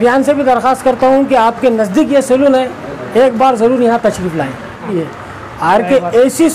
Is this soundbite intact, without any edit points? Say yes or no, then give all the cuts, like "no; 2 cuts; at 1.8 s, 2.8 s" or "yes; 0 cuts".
no; 1 cut; at 4.9 s